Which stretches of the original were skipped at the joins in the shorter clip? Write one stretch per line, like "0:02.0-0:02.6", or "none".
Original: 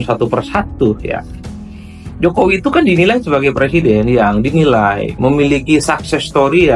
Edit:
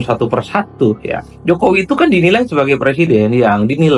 0:01.3-0:02.0

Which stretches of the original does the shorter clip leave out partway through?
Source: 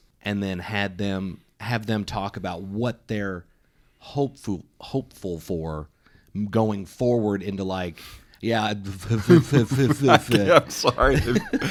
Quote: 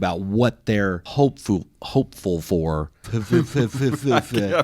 0:03.5-0:04.0
0:06.0-0:09.0

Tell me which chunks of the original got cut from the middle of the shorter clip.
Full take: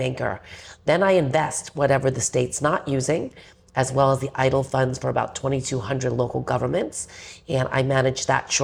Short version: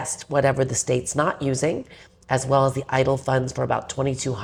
none

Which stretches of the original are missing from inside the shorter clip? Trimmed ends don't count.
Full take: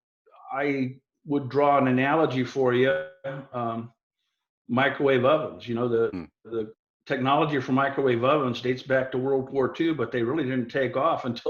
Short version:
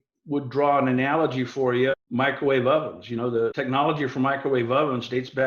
0:03.0-0:04.6
0:06.1-0:07.1

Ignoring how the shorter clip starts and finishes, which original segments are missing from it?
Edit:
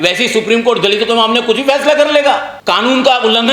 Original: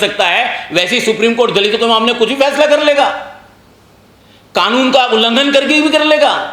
0:03.2-0:04.4

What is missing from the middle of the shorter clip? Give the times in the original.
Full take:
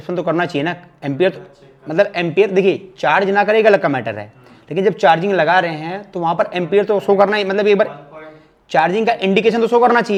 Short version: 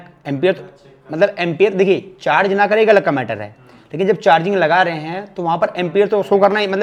none

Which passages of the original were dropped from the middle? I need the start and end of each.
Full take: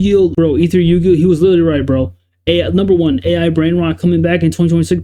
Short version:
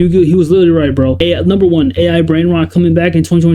0:02.1-0:02.4

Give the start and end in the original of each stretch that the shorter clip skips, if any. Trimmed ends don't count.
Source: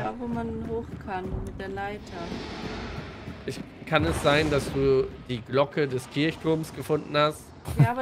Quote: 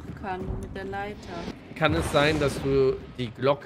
0:02.4-0:03.7

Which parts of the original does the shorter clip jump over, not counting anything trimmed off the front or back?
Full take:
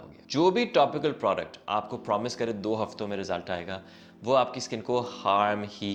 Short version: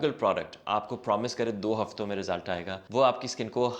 0:03.8-0:04.1

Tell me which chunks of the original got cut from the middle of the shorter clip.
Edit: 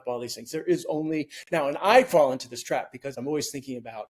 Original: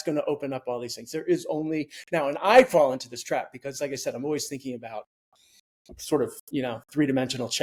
0:03.8-0:04.1

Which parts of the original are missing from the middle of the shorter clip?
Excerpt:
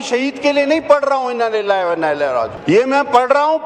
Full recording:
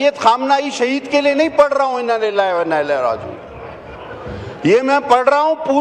0:03.2-0:04.5

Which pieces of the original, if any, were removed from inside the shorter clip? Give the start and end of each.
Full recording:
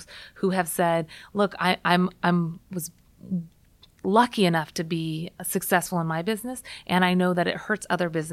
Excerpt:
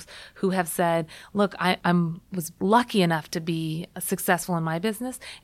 0:01.9-0:03.3

